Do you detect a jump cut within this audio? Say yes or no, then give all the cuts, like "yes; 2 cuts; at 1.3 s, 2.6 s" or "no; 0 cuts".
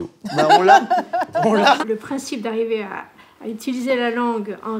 no; 0 cuts